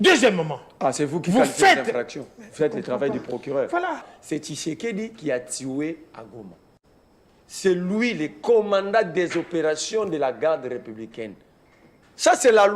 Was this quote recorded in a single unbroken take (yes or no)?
no